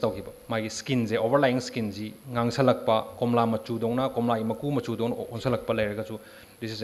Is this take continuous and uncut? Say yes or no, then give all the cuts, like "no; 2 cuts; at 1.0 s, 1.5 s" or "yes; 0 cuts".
yes; 0 cuts